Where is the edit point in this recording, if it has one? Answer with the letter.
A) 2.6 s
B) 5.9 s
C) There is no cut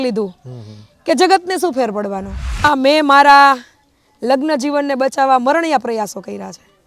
A